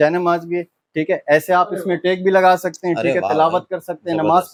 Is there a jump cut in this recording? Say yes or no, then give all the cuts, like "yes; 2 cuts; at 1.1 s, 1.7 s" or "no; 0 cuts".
no; 0 cuts